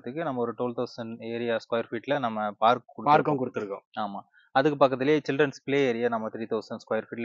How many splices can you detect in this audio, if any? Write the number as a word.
zero